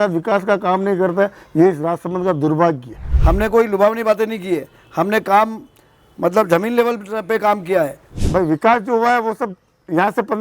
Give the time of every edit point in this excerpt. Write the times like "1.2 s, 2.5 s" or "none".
3.1 s, 8.2 s